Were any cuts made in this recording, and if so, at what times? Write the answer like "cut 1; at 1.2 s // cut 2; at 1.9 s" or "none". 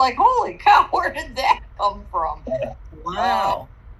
none